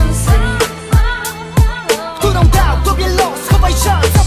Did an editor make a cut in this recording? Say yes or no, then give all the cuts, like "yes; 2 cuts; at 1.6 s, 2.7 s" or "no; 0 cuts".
no; 0 cuts